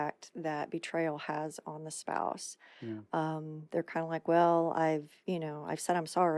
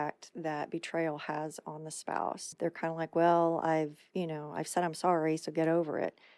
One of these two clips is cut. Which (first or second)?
second